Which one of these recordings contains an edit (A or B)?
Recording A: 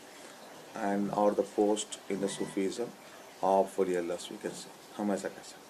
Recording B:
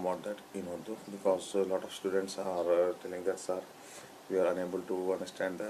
A